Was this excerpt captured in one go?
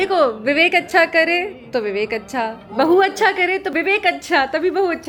yes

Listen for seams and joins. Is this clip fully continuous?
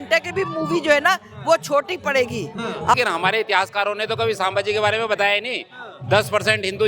no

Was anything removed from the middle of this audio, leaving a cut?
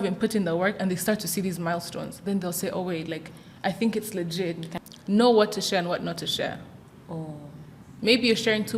yes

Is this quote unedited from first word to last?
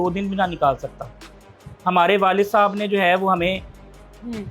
yes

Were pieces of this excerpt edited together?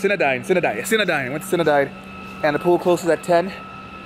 no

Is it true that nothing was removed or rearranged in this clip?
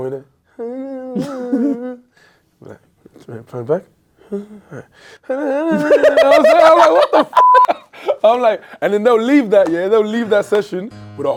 yes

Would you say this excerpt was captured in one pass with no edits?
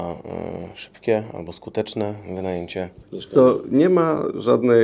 yes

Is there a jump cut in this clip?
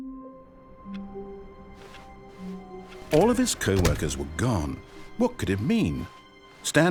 no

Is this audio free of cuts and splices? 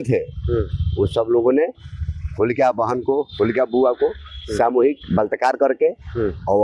yes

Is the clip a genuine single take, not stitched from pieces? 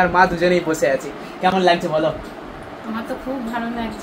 yes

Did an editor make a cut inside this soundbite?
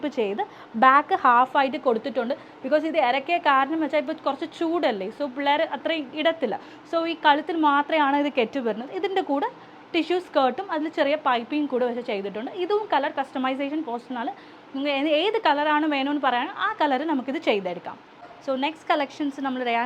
no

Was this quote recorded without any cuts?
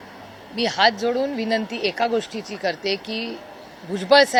yes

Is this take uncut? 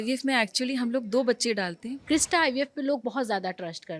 no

